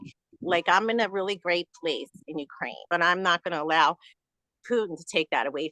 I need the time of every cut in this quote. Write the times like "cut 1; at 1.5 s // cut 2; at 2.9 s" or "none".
cut 1; at 2.8 s